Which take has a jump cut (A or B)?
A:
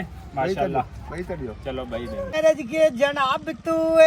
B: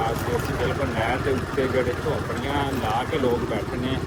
A